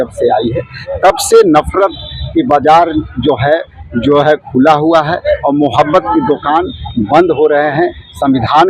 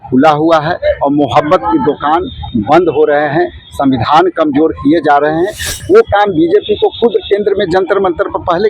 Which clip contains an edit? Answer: second; 1 cut; at 5.7 s

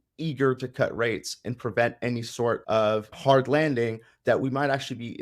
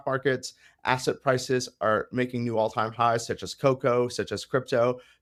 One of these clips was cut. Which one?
first; 1 cut; at 3.0 s

